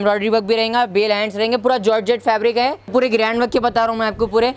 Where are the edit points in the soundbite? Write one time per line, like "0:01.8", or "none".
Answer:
0:02.9